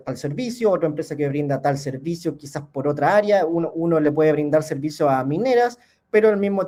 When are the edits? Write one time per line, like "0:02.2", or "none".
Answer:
none